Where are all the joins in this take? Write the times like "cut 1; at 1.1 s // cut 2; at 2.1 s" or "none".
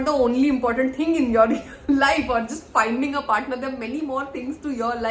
none